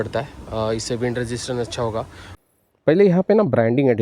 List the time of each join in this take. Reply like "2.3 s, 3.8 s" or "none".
2.2 s

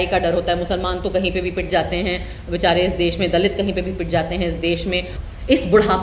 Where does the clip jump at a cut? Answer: 5.1 s

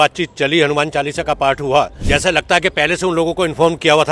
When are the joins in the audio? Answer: 2.0 s

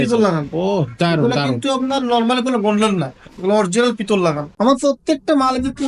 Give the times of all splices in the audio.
4.5 s

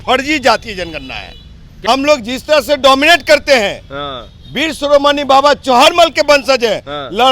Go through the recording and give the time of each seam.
1.8 s

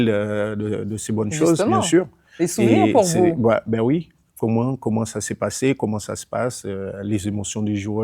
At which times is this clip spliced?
none

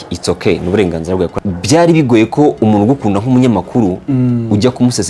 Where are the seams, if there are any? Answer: 1.3 s

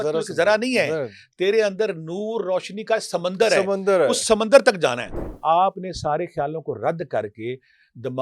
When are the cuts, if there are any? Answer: 5.1 s

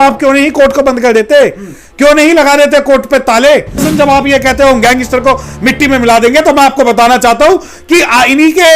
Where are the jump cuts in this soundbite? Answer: 3.8 s

